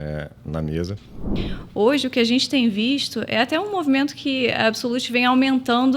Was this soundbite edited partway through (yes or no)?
yes